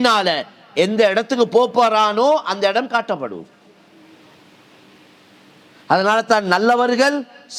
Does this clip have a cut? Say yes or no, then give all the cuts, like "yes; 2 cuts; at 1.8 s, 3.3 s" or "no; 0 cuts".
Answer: no; 0 cuts